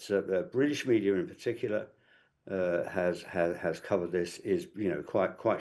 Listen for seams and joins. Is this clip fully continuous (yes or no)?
yes